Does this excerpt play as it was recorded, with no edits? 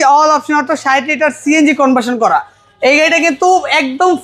yes; 0 cuts

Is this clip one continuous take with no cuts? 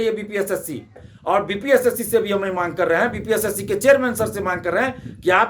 no; 1 cut; at 1.1 s

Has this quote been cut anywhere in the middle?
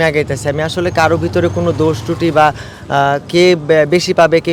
no; 0 cuts

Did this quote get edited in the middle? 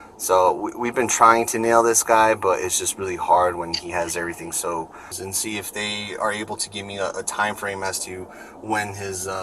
yes; 1 cut; at 5.1 s

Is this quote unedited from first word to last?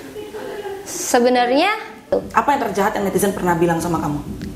no; 1 cut; at 2.0 s

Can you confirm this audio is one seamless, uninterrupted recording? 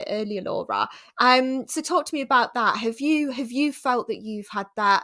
yes; 0 cuts

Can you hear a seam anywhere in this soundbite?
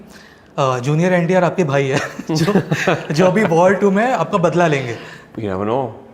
no; 0 cuts

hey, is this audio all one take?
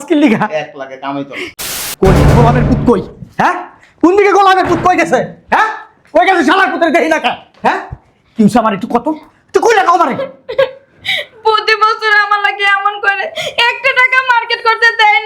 no; 1 cut; at 1.5 s

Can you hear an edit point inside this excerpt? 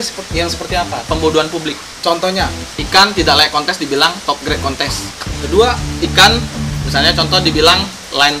yes; 3 cuts; at 2.7 s, 5.3 s, 5.9 s

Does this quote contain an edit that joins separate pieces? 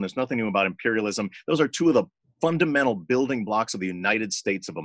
no; 0 cuts

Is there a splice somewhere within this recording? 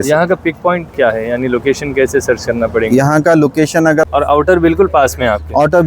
yes; 1 cut; at 4.0 s

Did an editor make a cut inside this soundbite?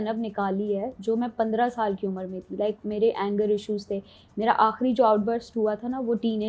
no; 0 cuts

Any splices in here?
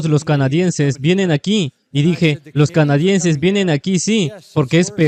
no; 0 cuts

